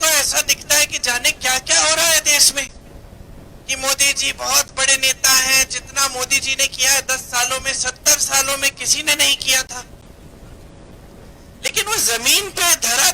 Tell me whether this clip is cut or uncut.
uncut